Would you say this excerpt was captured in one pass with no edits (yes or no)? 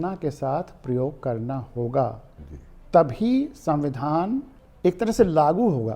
no